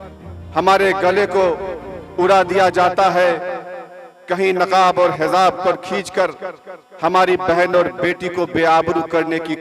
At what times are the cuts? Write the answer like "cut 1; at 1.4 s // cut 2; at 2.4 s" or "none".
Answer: none